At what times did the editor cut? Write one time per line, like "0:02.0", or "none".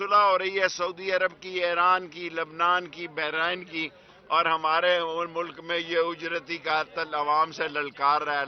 none

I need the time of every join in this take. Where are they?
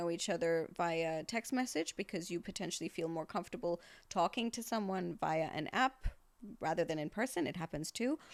none

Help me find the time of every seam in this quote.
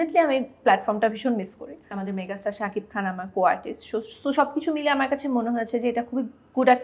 0:01.9

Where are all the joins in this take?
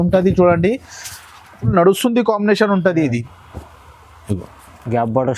0:01.6

